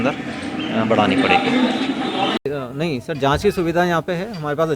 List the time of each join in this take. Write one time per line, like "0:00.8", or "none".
0:02.5